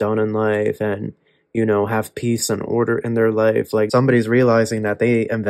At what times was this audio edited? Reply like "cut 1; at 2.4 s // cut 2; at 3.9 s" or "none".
cut 1; at 3.9 s